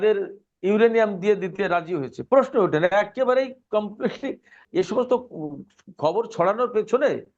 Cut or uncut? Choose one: cut